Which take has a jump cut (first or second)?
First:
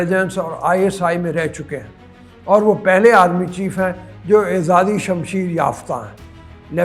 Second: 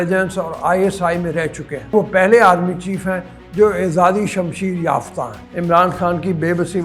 second